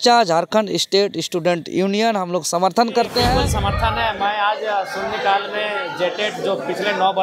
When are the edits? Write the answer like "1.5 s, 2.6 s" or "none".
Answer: 3.4 s